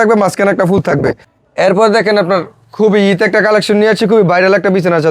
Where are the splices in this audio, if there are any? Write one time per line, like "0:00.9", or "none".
0:01.3